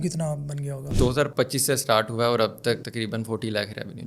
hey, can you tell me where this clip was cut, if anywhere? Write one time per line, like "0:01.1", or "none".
0:00.9